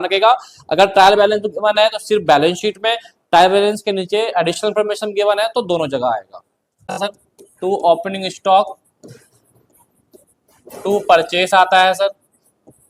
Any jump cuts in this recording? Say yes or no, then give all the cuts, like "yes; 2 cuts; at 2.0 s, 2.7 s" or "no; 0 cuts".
yes; 1 cut; at 7.0 s